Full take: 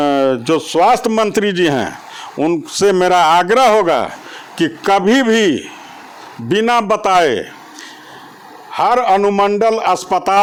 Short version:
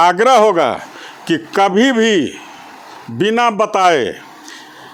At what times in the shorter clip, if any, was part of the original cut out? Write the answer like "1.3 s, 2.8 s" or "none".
none